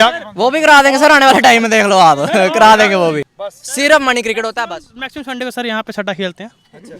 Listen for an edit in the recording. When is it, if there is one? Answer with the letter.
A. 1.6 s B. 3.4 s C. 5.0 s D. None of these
B